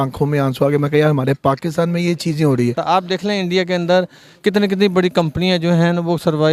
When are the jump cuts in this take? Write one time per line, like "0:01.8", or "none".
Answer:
0:02.8

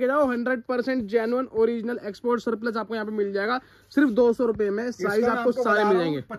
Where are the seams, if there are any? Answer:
none

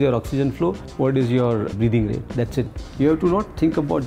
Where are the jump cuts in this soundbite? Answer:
0:00.8
0:01.7
0:02.8

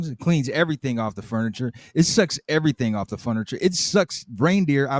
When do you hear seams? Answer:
none

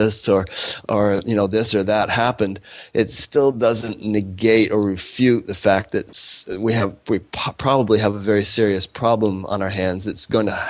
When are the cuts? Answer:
none

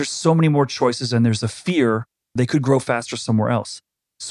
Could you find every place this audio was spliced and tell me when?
0:02.4

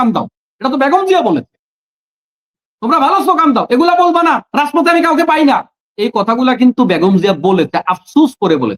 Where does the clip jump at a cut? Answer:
none

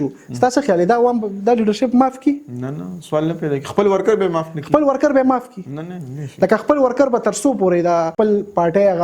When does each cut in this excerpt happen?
0:08.1

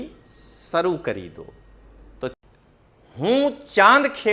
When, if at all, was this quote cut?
0:02.4

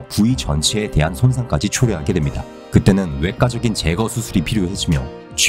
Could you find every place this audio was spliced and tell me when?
none

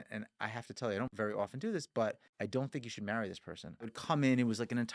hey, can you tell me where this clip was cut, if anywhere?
0:01.1
0:02.3
0:03.9

